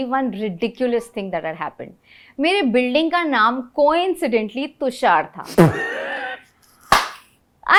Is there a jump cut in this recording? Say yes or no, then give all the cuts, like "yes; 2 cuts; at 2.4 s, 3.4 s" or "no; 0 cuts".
no; 0 cuts